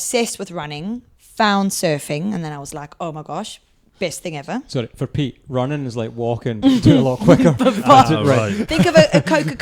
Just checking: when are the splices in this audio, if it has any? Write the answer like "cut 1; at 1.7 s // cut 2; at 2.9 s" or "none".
none